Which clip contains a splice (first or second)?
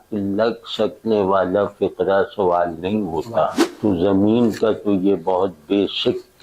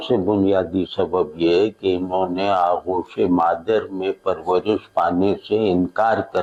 first